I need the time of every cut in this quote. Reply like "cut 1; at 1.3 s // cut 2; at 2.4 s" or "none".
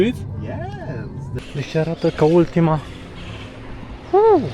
cut 1; at 1.3 s